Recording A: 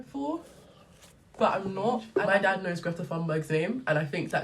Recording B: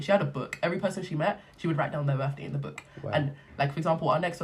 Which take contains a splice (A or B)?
A